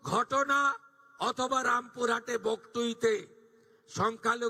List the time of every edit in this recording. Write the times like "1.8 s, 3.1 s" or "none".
none